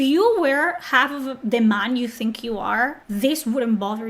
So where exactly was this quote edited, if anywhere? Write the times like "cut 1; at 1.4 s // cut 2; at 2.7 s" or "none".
cut 1; at 3.0 s